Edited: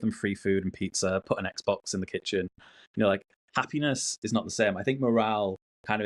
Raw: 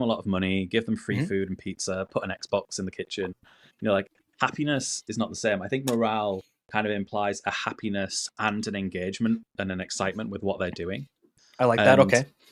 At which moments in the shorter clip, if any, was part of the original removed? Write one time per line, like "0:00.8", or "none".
none